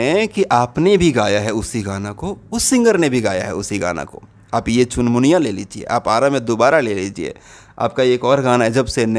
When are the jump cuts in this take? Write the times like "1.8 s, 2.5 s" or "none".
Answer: none